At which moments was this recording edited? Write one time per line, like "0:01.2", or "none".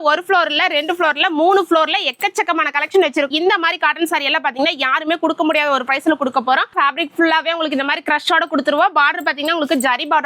0:03.3
0:06.7